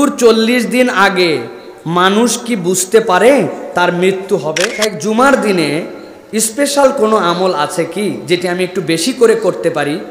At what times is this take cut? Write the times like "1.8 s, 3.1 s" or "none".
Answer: 4.7 s